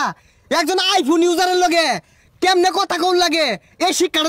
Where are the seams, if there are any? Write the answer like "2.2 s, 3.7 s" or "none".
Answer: none